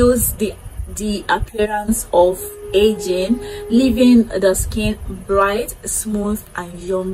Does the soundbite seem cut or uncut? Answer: uncut